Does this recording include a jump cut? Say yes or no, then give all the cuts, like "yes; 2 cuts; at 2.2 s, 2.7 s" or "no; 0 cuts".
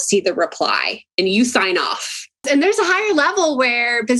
yes; 1 cut; at 2.5 s